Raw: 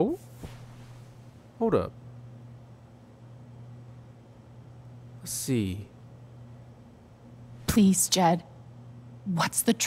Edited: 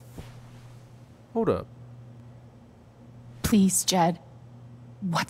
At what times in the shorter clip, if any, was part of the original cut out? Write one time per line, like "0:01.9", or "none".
0:02.2